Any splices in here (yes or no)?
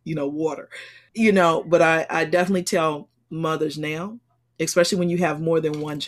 yes